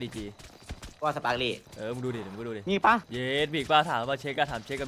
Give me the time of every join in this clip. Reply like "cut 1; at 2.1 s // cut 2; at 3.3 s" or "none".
cut 1; at 1.7 s // cut 2; at 3.1 s